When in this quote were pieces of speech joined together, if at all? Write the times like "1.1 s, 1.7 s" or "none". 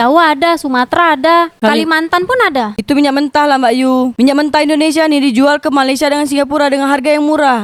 none